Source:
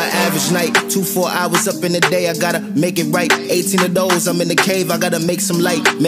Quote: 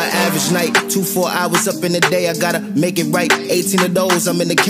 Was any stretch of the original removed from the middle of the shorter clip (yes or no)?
no